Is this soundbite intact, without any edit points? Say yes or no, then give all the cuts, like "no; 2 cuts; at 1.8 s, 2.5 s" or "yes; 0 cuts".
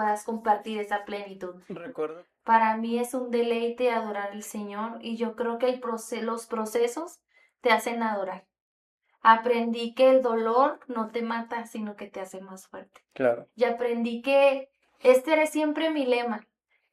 no; 1 cut; at 2.1 s